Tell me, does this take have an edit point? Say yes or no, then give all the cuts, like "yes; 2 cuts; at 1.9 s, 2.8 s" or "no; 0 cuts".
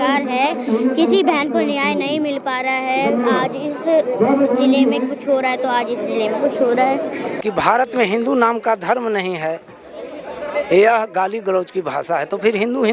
yes; 1 cut; at 7.3 s